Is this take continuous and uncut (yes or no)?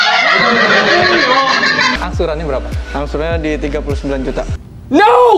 no